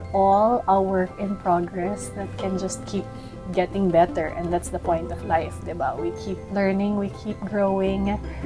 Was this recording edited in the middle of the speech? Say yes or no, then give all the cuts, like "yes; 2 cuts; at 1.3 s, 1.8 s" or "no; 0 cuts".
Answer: no; 0 cuts